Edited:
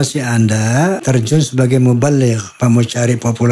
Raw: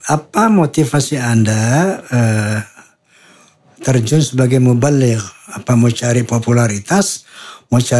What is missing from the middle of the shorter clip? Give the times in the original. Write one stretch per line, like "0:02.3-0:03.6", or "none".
0:02.0-0:03.8
0:05.3-0:05.5